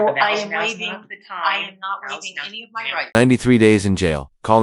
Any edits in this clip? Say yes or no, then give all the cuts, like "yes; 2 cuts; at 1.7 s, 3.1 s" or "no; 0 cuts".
no; 0 cuts